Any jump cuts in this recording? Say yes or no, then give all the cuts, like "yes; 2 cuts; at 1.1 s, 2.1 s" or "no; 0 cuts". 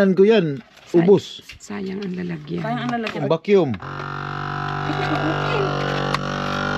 yes; 1 cut; at 3.2 s